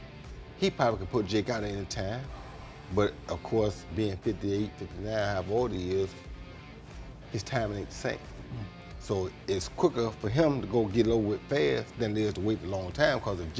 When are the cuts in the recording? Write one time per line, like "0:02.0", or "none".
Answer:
none